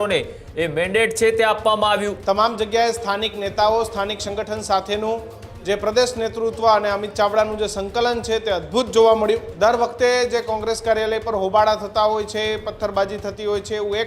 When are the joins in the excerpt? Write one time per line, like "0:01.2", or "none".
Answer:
0:02.1
0:09.5